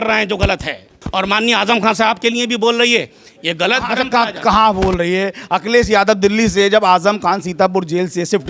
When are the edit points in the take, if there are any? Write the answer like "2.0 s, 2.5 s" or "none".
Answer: none